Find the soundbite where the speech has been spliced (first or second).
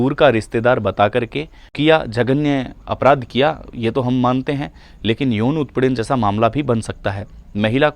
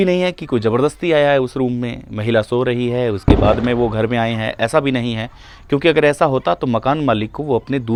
first